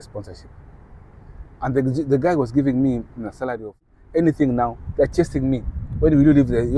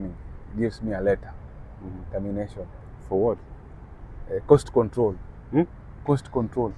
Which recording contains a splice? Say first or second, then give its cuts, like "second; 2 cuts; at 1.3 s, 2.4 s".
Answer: first; 1 cut; at 3.8 s